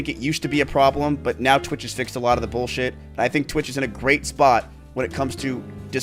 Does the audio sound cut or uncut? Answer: uncut